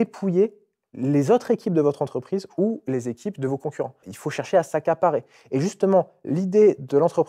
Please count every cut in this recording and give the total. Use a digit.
1